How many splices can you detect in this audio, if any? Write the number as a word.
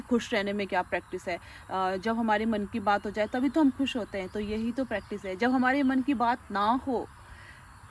zero